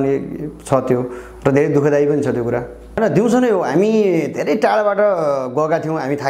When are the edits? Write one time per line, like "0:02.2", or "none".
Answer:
0:03.0